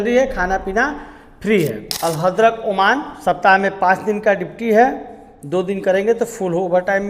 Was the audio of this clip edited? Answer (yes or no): yes